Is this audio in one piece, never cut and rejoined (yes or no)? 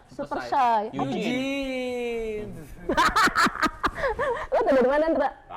yes